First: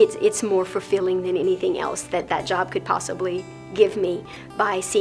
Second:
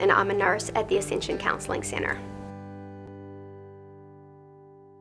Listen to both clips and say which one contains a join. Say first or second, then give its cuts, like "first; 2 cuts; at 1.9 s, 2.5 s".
second; 1 cut; at 2.1 s